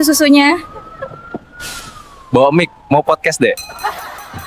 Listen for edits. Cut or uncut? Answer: uncut